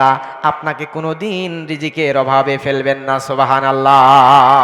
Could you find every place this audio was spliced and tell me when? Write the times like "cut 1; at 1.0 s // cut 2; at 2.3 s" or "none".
none